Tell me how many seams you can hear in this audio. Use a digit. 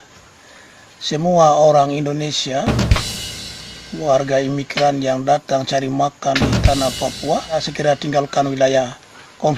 1